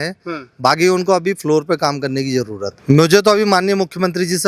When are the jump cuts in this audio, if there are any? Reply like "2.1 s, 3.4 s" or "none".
2.7 s